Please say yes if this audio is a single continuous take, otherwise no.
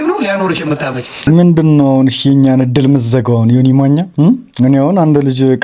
no